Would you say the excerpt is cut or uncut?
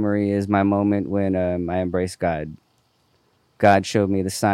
uncut